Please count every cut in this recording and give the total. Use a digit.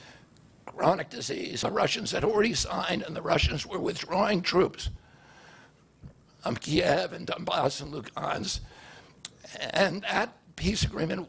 1